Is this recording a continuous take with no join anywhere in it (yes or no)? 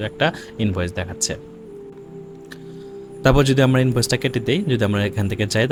yes